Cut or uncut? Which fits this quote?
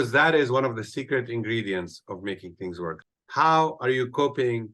cut